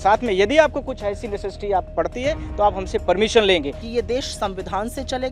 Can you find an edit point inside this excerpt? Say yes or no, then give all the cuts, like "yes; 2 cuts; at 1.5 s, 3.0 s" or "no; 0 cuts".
yes; 1 cut; at 3.8 s